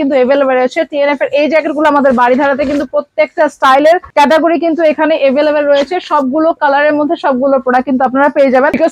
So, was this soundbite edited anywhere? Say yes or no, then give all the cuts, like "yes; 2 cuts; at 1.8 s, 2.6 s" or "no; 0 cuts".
no; 0 cuts